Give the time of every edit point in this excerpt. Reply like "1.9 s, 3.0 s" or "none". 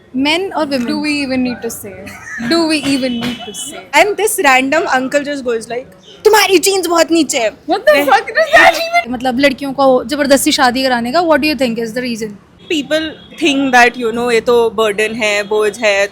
3.7 s, 9.1 s, 12.5 s